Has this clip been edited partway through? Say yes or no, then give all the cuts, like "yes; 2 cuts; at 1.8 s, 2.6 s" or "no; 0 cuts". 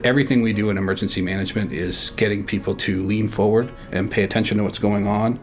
no; 0 cuts